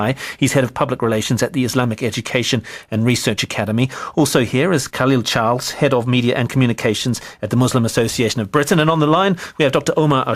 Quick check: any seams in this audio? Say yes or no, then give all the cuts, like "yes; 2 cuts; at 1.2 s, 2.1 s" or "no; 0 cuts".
yes; 1 cut; at 4.0 s